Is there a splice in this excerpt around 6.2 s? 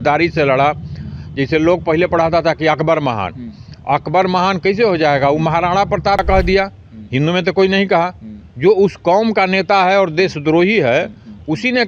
yes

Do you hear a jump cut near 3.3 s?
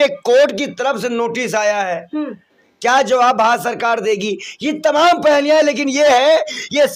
no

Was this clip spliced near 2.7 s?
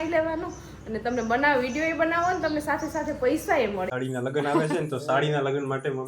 no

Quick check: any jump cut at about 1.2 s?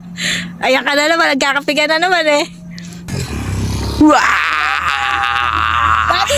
no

